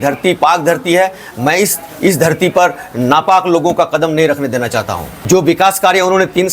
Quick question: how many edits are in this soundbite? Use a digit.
1